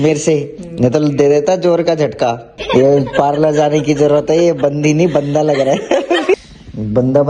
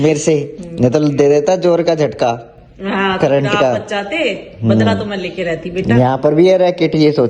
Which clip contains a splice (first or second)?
first